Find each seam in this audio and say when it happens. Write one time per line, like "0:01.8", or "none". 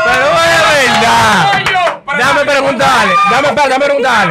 none